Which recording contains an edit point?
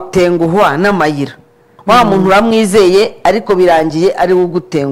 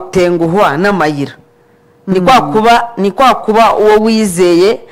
first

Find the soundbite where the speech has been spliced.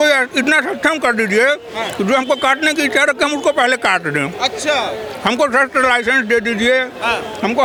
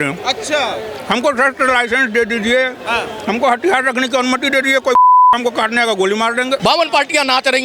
second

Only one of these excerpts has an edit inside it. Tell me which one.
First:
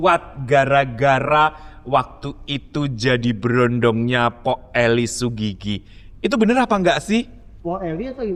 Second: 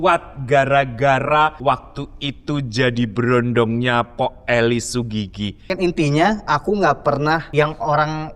second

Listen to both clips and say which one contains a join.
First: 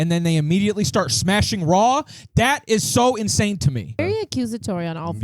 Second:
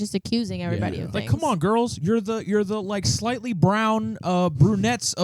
first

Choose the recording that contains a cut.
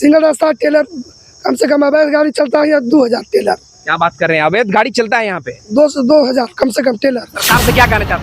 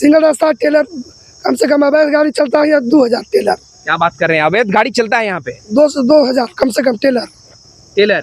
first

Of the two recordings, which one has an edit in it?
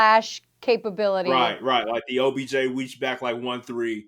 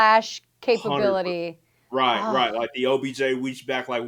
first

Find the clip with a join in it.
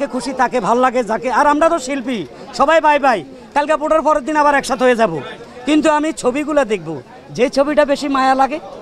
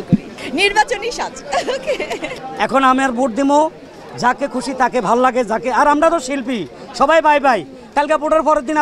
second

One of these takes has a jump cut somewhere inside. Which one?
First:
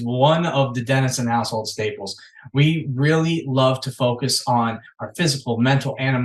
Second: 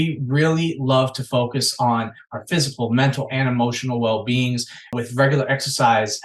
second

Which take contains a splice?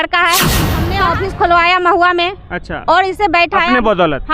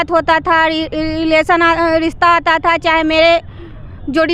first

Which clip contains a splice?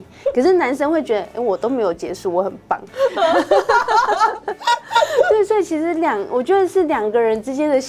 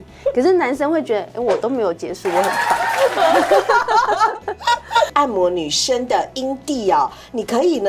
second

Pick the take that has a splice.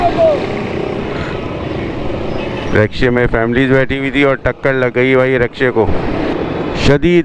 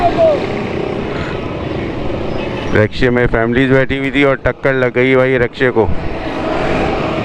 first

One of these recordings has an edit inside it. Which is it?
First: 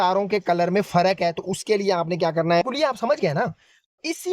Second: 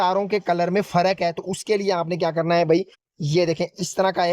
first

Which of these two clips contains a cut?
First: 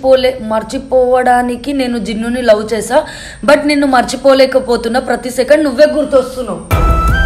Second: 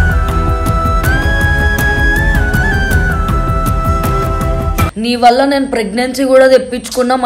second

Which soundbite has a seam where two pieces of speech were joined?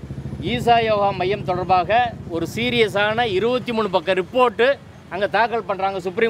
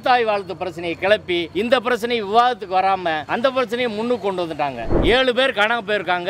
second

